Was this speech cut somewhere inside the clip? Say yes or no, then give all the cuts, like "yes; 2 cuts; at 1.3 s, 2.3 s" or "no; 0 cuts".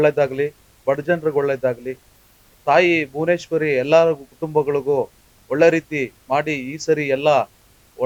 no; 0 cuts